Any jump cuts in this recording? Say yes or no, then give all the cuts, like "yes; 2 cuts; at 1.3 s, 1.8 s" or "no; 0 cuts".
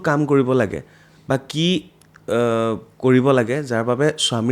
no; 0 cuts